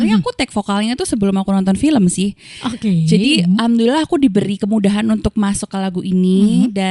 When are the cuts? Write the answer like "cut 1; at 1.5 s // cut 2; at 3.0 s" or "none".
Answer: none